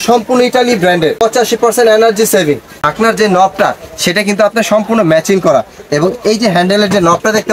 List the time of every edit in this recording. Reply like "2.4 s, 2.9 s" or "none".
1.2 s, 2.8 s